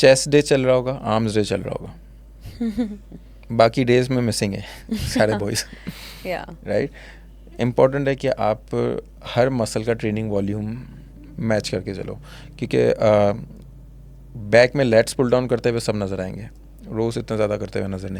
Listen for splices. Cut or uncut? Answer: uncut